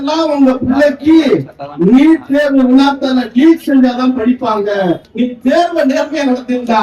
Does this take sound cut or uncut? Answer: cut